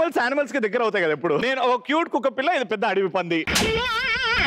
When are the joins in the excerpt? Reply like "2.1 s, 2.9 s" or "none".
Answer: 1.4 s